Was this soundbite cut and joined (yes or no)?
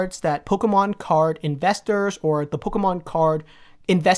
no